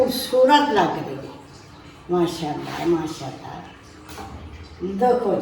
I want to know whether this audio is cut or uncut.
uncut